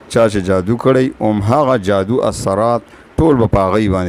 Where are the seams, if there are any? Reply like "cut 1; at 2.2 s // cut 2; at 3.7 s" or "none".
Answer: none

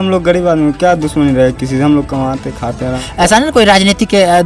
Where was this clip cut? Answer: cut 1; at 3.0 s

